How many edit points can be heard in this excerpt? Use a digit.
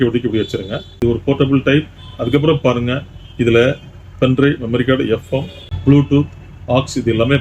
1